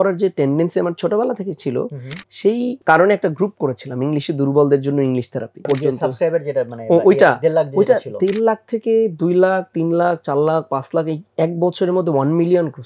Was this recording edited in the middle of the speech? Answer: yes; 2 cuts; at 2.8 s, 5.6 s

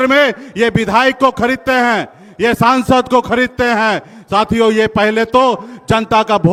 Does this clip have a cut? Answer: no; 0 cuts

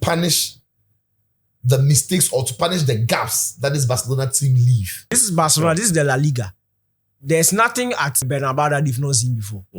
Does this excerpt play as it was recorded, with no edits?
no; 2 cuts; at 5.2 s, 8.2 s

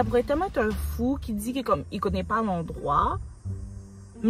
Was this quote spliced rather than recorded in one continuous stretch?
no; 0 cuts

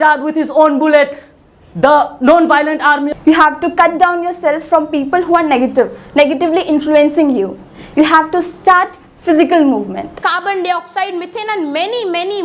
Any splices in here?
yes; 2 cuts; at 3.1 s, 10.2 s

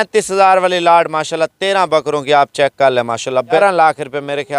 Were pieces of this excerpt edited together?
yes; 1 cut; at 3.6 s

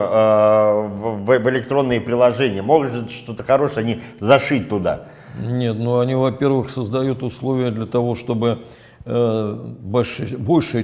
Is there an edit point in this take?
no; 0 cuts

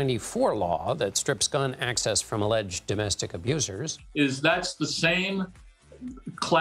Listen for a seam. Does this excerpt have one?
yes; 1 cut; at 4.0 s

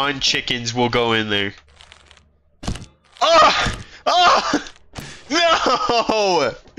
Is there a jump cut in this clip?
no; 0 cuts

